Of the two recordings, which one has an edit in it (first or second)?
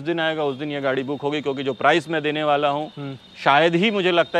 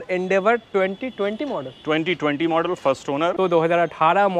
second